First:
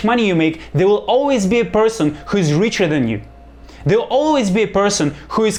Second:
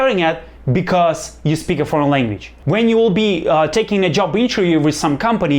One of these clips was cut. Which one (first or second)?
second